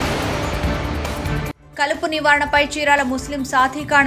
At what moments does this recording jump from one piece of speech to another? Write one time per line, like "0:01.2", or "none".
0:01.4